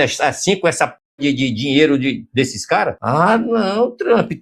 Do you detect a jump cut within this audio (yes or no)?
yes